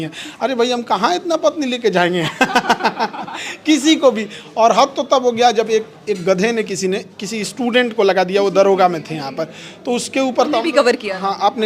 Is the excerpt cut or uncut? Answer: uncut